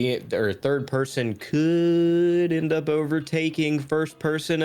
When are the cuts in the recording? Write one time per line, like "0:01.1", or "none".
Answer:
none